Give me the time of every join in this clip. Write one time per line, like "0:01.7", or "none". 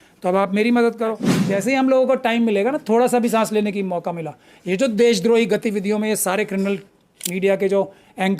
0:01.3